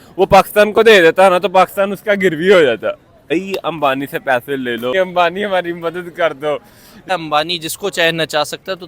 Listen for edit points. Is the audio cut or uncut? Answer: cut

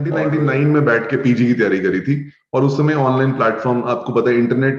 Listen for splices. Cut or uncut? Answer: uncut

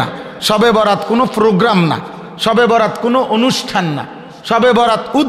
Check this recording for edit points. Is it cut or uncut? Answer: uncut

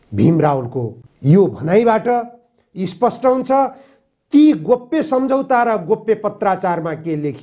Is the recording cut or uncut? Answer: uncut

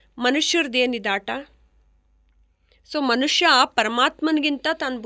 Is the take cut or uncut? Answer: uncut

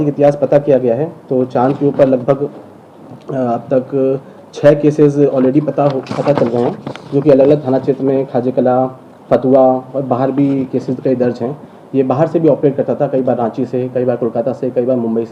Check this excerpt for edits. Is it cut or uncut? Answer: uncut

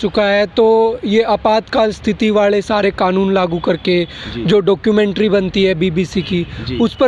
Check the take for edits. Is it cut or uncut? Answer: uncut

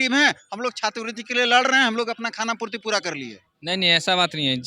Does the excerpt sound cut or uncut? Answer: uncut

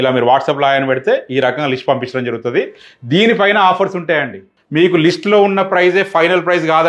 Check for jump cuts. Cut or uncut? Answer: cut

